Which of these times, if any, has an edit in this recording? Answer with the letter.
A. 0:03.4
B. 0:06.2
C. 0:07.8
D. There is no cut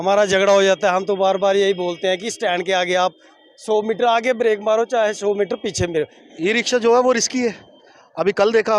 B